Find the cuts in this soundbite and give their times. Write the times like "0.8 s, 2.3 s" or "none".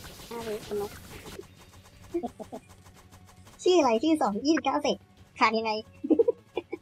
1.4 s

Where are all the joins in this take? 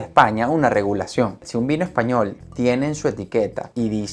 1.4 s

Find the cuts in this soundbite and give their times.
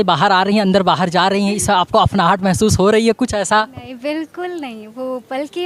none

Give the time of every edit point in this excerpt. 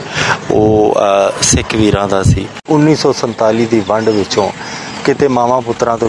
2.6 s

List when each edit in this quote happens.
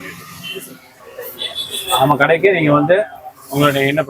1.1 s

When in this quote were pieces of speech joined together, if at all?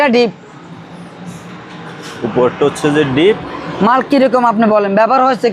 none

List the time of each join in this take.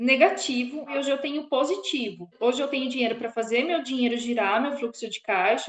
0.9 s, 2.3 s

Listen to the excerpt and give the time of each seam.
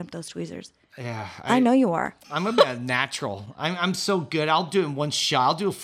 2.2 s

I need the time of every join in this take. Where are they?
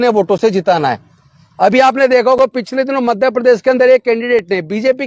none

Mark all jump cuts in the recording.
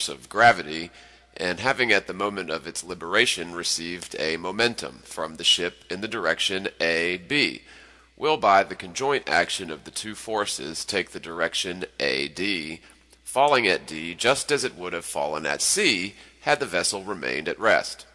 9.4 s

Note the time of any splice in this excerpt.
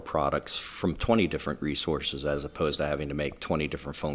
none

